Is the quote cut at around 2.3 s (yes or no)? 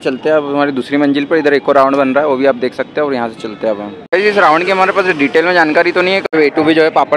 no